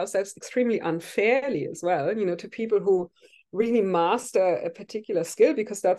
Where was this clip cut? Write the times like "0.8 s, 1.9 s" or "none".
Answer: none